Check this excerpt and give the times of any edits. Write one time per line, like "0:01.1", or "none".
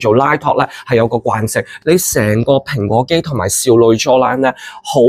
0:01.7